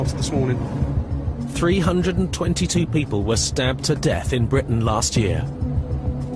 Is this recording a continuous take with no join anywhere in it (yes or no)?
no